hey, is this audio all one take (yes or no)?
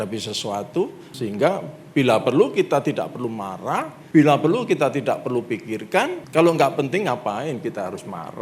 no